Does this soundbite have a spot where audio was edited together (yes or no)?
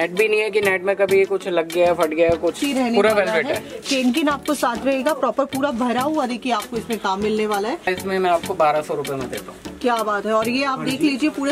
yes